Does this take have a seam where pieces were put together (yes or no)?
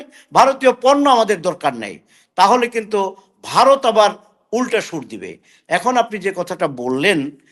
no